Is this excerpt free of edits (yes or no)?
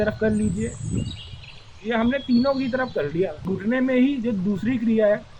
no